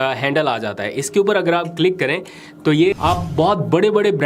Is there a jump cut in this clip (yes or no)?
yes